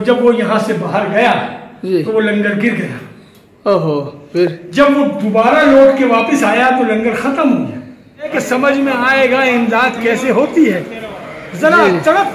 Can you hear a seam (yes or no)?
yes